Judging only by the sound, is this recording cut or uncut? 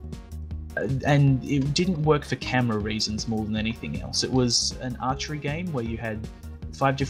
uncut